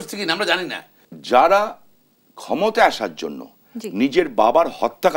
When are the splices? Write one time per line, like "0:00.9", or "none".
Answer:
0:01.1